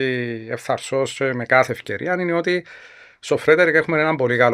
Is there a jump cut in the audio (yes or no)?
no